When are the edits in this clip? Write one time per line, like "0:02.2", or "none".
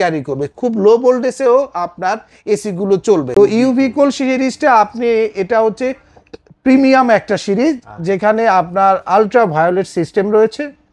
0:03.3